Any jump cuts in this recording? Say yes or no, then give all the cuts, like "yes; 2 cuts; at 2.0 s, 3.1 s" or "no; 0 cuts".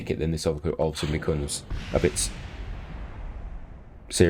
no; 0 cuts